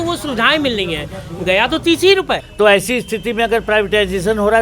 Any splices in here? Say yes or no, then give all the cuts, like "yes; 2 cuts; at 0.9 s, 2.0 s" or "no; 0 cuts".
yes; 1 cut; at 2.5 s